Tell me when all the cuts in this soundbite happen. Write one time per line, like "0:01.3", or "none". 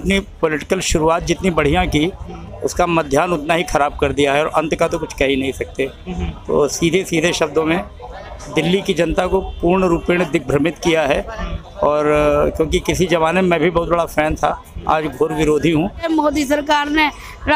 0:16.1